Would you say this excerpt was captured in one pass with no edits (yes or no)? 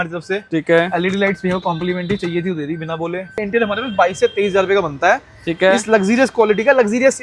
no